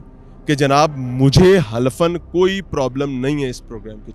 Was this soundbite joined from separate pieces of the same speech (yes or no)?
no